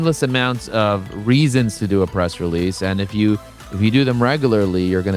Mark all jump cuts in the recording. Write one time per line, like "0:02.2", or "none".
none